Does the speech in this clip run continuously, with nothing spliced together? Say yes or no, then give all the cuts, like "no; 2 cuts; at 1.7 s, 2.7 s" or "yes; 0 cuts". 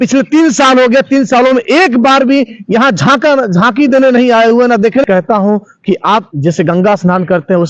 no; 1 cut; at 5.0 s